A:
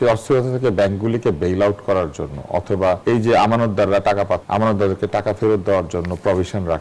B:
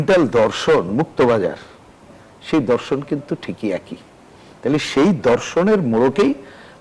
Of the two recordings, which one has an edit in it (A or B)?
A